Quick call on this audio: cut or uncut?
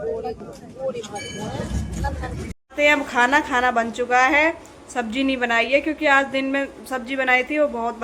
cut